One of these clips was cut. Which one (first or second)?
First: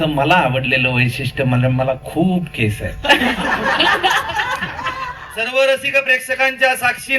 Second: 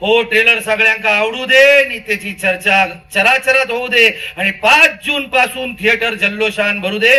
first